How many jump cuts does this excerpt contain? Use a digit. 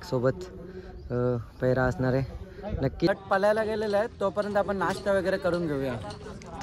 1